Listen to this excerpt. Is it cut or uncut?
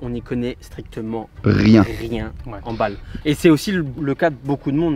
uncut